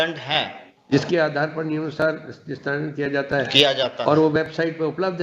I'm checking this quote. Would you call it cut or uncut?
uncut